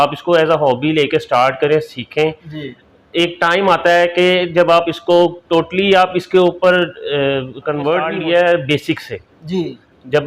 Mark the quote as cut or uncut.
cut